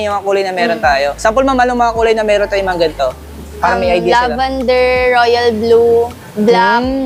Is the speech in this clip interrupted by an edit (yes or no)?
no